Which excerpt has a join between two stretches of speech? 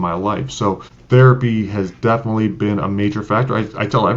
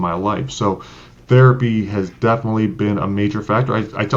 first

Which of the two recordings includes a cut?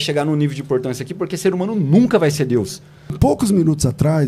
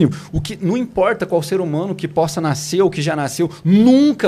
first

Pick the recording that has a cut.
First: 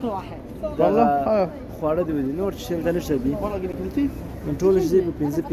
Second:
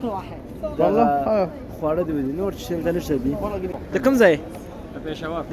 second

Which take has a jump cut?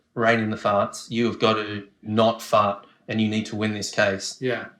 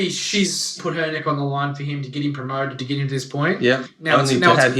second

